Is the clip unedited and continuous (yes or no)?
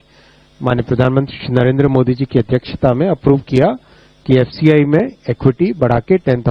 yes